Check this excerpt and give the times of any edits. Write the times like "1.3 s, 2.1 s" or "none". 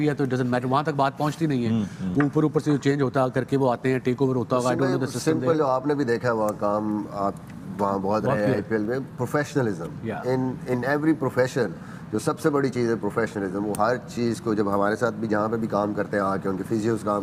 none